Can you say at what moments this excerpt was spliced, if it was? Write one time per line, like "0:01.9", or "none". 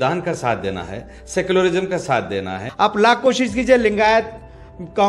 0:02.6